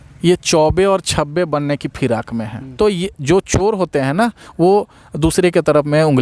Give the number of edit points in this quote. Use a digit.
1